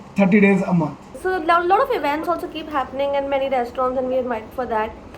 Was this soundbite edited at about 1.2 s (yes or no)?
yes